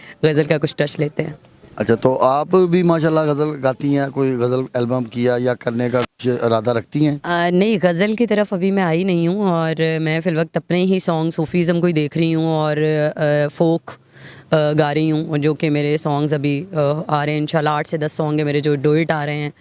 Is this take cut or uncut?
uncut